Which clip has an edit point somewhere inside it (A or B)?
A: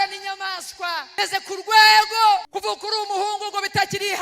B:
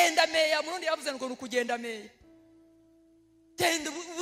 A